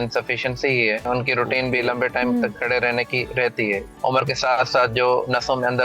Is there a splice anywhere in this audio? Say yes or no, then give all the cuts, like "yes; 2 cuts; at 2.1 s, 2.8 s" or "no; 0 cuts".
yes; 2 cuts; at 1.0 s, 3.9 s